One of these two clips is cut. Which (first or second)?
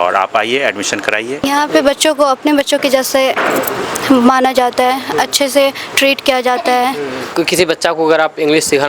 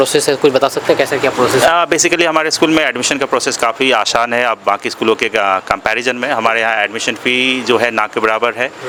first